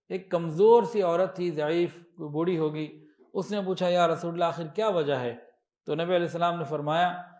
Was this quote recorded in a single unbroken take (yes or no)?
yes